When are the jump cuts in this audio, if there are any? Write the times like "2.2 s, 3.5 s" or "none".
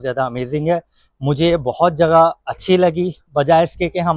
none